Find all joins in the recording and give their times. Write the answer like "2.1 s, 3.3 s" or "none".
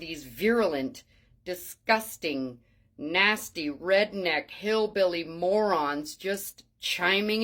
none

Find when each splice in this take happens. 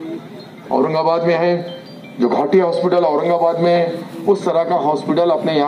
none

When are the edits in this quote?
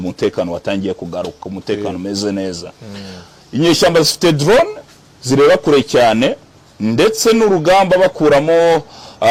none

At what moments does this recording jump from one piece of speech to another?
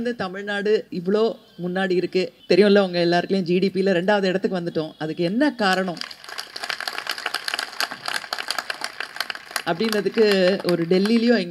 0.9 s, 2.4 s

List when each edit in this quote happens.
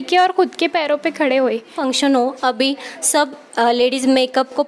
1.8 s

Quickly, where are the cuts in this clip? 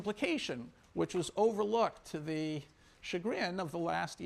none

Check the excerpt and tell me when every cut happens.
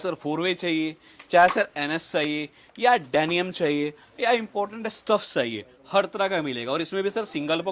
none

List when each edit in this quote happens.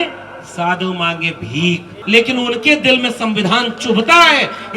2.0 s

